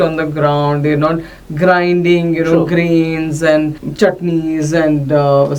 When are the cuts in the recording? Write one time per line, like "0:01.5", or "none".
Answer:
0:03.8